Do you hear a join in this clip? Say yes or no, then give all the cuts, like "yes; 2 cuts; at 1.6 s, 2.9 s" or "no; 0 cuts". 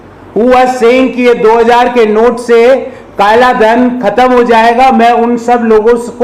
no; 0 cuts